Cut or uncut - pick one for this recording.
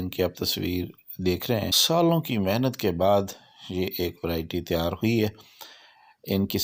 cut